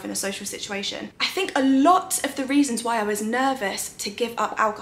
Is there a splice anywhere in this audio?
yes; 1 cut; at 1.0 s

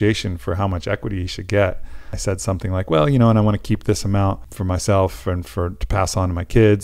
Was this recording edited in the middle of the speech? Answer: yes; 2 cuts; at 2.1 s, 4.5 s

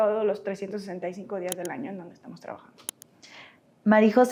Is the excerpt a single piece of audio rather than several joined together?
yes; 0 cuts

